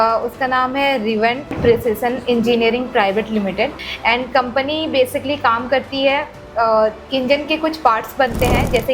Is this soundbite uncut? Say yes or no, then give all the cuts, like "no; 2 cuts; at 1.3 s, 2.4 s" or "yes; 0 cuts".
no; 1 cut; at 3.9 s